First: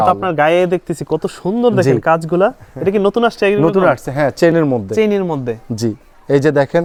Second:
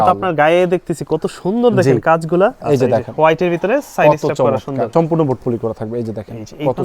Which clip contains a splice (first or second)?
second